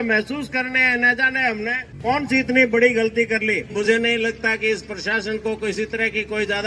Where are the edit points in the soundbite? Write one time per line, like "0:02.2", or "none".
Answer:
0:01.9
0:03.7